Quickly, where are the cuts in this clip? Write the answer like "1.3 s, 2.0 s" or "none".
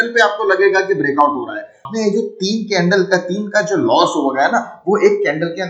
1.8 s